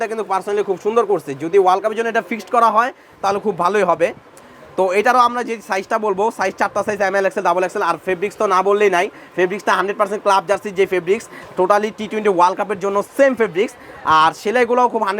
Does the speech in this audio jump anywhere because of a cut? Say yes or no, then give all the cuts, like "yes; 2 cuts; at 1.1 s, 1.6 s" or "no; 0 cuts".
no; 0 cuts